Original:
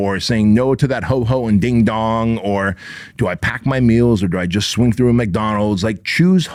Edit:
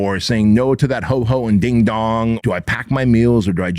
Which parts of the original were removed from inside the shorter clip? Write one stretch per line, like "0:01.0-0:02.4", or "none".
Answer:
0:02.4-0:03.1